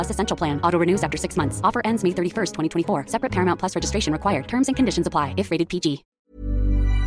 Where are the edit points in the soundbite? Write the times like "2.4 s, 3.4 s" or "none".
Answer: 6.1 s